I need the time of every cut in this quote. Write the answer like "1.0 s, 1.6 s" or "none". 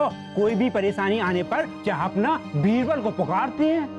1.7 s